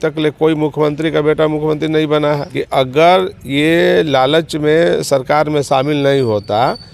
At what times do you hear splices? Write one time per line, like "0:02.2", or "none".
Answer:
0:02.5

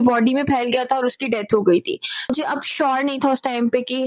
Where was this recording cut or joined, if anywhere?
0:02.3

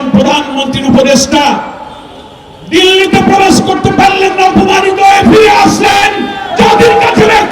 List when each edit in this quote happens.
none

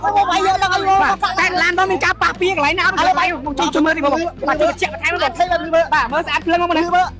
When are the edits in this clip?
none

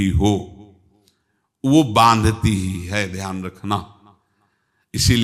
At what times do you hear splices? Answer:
none

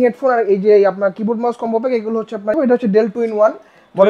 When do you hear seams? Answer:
0:02.5

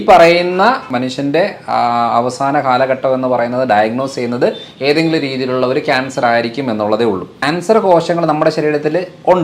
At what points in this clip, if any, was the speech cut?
0:00.9
0:07.4

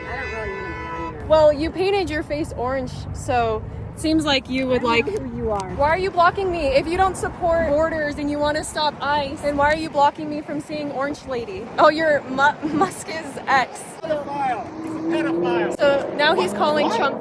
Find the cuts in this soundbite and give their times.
0:01.2
0:05.7
0:07.7
0:09.3
0:11.6
0:13.9

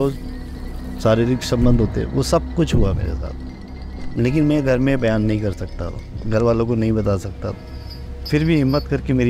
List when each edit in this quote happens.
none

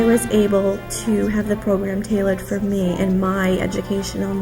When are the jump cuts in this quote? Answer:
none

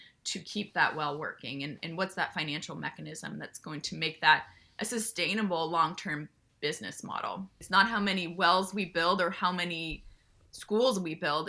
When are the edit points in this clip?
0:07.6

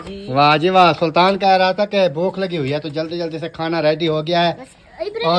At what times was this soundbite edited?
none

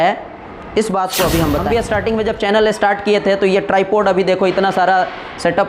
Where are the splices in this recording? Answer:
0:01.7

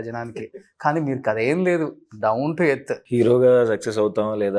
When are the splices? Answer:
0:03.0

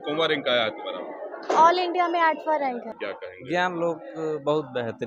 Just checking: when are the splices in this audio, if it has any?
0:03.0

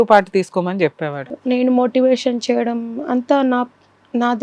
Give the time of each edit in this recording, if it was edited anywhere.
0:01.2

